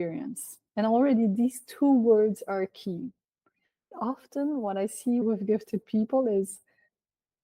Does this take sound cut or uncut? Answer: cut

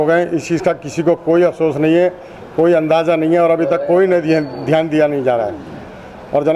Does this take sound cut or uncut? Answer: uncut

